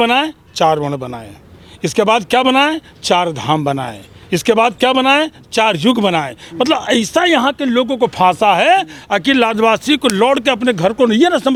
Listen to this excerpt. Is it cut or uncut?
uncut